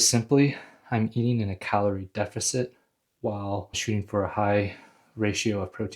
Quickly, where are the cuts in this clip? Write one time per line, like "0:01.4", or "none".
0:03.8